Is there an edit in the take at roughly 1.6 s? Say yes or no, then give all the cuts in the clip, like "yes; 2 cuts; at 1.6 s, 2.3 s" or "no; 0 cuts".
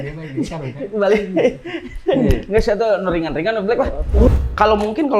no; 1 cut; at 4.3 s